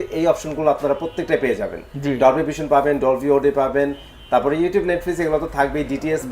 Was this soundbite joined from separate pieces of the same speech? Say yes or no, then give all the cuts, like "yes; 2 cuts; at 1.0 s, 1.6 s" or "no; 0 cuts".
no; 0 cuts